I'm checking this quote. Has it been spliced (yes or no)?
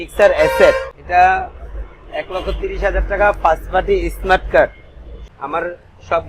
yes